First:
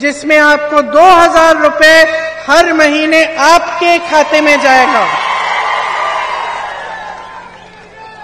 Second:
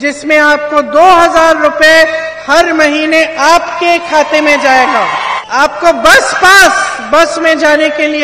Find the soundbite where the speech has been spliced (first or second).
second